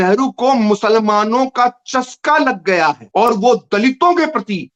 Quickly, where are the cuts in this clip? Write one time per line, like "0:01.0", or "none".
none